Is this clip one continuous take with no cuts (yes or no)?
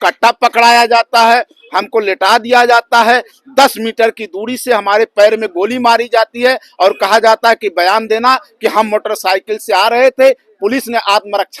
yes